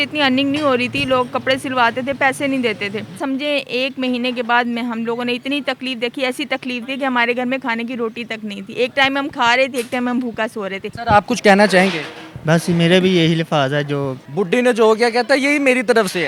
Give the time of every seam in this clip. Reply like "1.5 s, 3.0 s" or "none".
3.2 s, 10.9 s, 14.2 s